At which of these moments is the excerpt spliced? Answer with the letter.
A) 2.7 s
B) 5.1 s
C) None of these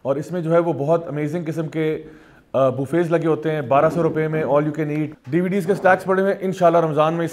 B